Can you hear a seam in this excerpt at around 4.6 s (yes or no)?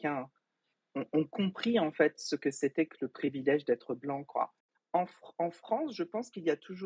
yes